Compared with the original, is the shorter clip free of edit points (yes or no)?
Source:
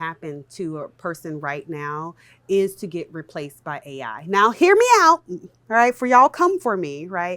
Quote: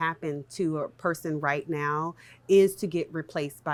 yes